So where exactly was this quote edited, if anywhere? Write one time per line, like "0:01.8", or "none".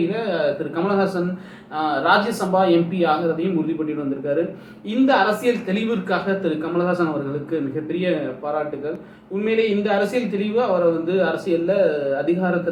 none